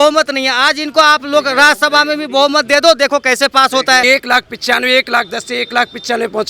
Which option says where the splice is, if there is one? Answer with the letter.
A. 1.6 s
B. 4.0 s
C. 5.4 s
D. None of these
B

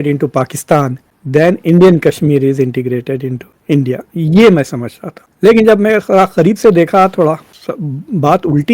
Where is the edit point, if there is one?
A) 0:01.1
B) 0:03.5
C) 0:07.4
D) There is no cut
C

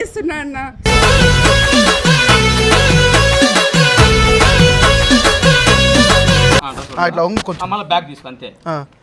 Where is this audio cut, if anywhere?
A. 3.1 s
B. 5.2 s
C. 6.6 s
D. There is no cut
C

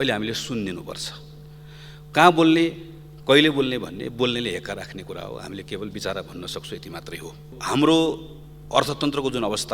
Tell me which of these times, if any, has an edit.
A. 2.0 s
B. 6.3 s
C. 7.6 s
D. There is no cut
C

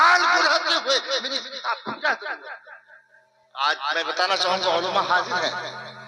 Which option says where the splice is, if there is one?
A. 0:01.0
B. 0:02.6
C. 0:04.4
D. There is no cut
D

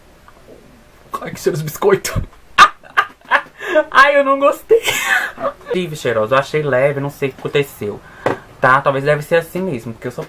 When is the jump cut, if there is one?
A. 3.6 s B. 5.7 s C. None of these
B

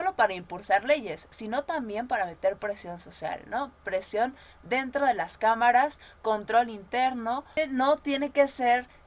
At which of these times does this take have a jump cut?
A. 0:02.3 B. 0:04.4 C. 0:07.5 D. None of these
C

